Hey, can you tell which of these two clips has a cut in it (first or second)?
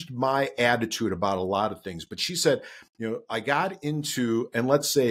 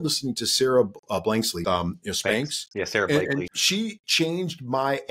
second